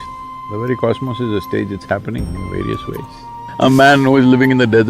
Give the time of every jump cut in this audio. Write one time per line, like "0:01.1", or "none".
0:03.4